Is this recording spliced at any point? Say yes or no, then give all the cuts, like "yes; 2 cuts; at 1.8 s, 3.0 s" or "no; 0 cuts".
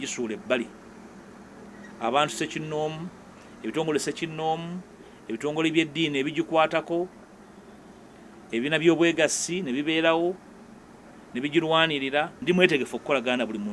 yes; 1 cut; at 12.4 s